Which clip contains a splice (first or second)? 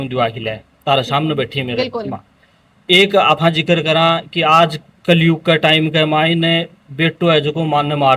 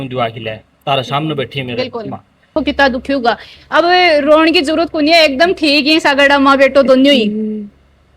second